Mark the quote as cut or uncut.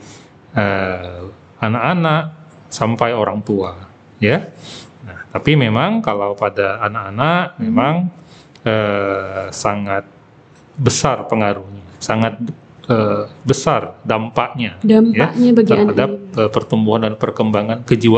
uncut